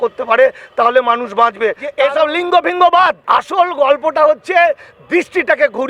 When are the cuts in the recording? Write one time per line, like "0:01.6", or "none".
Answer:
0:01.8
0:03.2